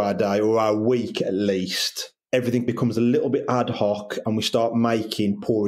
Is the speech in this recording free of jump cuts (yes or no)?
yes